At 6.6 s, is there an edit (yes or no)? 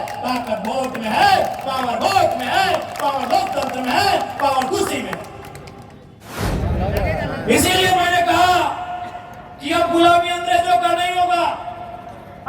yes